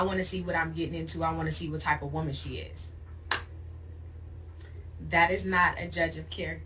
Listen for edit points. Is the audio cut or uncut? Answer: uncut